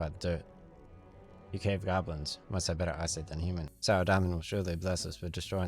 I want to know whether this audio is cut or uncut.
cut